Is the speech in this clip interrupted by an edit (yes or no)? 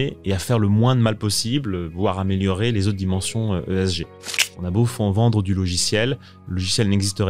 yes